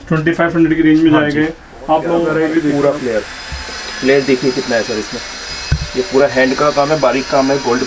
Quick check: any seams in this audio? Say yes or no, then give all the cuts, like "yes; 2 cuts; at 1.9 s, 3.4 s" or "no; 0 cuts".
yes; 1 cut; at 2.3 s